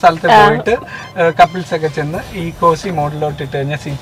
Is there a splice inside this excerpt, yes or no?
no